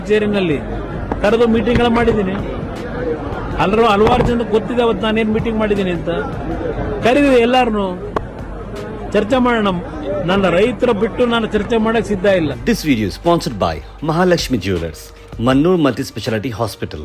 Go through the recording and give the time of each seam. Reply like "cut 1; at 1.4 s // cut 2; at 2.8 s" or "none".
cut 1; at 12.6 s